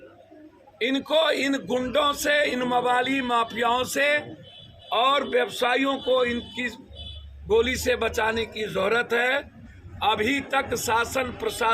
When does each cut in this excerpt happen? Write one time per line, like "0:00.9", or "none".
none